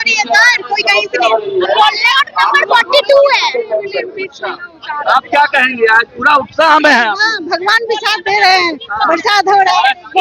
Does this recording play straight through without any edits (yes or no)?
yes